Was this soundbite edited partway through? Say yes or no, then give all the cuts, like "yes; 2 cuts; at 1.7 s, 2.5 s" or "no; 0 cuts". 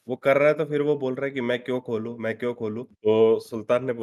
yes; 1 cut; at 2.8 s